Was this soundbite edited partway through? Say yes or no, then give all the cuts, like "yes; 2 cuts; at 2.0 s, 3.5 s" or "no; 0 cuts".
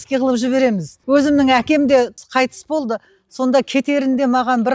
yes; 2 cuts; at 0.9 s, 2.1 s